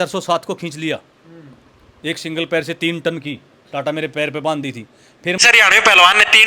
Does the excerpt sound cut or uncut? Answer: cut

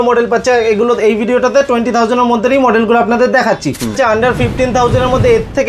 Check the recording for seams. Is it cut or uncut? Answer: cut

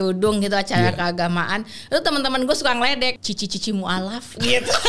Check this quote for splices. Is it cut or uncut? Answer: cut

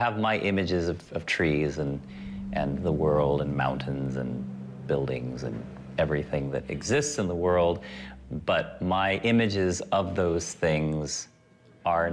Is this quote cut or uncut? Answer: cut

